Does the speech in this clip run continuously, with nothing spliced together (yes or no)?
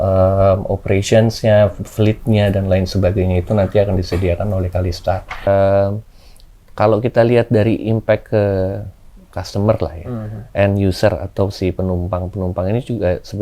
no